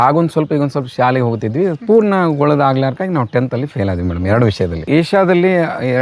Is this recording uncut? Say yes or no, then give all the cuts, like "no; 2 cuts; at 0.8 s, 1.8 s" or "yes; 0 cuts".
no; 1 cut; at 4.9 s